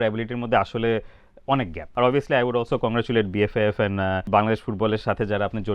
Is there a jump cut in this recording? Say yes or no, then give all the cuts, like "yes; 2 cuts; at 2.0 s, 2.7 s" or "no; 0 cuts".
yes; 2 cuts; at 1.8 s, 4.2 s